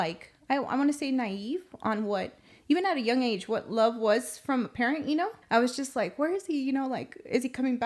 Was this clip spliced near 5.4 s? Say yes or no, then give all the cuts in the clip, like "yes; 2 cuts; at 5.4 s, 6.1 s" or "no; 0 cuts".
yes; 1 cut; at 5.4 s